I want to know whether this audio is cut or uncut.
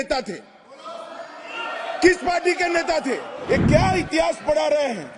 cut